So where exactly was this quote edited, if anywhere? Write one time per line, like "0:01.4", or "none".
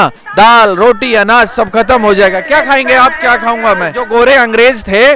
0:04.0